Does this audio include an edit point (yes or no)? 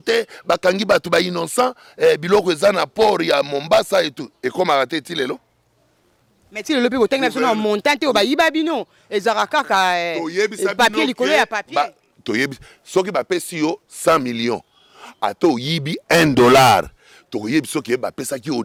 no